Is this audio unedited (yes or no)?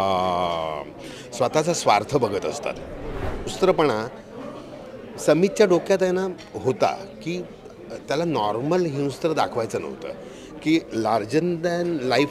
no